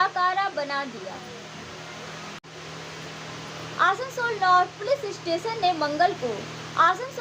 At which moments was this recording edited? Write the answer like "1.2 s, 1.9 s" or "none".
2.5 s